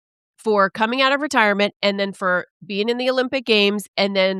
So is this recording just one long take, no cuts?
yes; 0 cuts

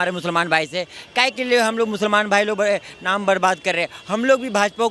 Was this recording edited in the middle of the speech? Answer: no; 0 cuts

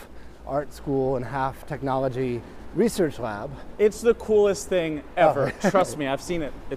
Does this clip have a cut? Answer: no; 0 cuts

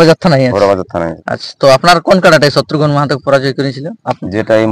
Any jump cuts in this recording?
yes; 1 cut; at 1.1 s

